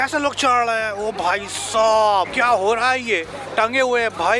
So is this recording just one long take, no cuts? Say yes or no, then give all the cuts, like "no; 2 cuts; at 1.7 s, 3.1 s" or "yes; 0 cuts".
no; 2 cuts; at 2.3 s, 3.4 s